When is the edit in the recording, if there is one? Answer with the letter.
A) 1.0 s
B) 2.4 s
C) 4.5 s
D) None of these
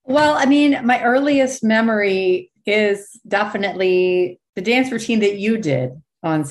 C